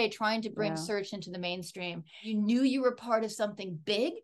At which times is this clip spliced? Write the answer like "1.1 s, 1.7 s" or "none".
2.1 s